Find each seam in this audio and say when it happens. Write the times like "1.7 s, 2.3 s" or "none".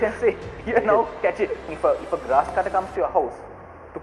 1.7 s